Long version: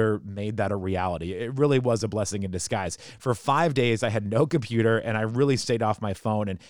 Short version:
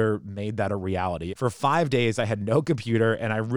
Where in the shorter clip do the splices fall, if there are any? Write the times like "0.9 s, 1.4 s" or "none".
1.3 s